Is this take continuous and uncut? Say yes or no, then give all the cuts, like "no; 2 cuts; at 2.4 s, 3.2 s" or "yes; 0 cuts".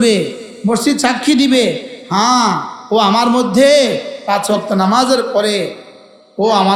yes; 0 cuts